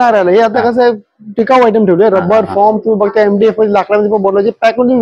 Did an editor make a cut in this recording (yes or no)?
no